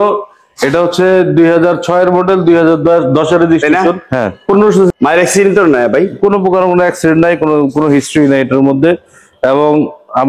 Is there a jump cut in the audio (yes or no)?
yes